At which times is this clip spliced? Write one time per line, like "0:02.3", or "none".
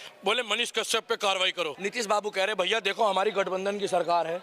0:01.7